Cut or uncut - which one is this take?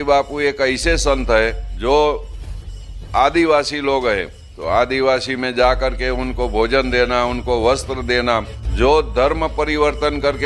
cut